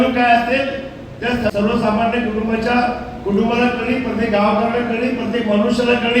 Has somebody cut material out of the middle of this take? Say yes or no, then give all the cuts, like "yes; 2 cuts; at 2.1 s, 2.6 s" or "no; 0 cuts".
yes; 1 cut; at 1.5 s